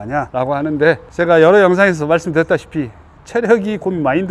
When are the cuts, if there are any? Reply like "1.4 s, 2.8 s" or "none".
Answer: none